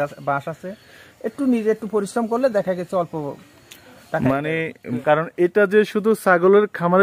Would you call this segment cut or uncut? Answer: cut